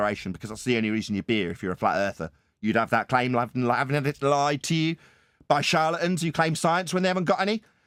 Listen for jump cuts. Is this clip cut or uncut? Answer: uncut